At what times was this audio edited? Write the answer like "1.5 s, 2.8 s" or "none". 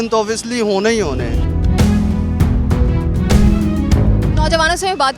none